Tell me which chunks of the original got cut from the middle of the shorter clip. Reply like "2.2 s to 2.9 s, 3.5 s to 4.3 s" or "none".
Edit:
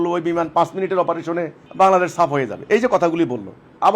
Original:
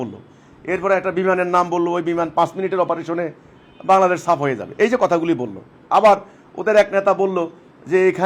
3.4 s to 3.7 s